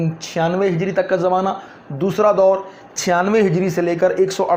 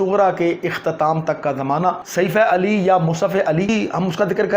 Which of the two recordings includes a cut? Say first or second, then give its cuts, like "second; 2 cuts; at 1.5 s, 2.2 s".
second; 2 cuts; at 2.0 s, 3.7 s